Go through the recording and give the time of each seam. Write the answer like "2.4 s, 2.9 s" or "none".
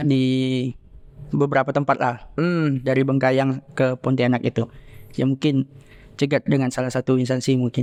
none